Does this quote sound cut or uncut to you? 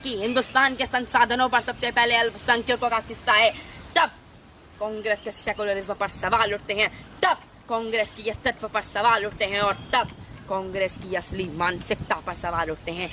uncut